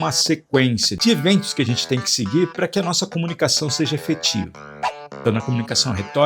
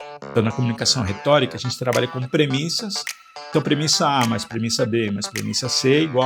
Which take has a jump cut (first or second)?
first